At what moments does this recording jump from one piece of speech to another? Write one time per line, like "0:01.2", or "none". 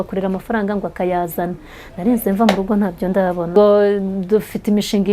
none